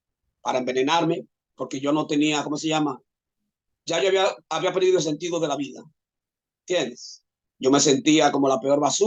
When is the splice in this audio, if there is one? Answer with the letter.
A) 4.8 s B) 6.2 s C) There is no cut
C